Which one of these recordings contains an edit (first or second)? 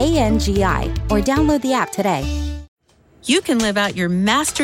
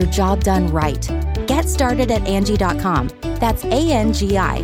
first